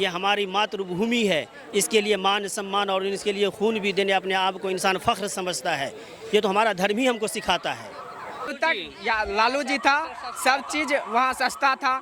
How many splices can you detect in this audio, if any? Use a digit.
1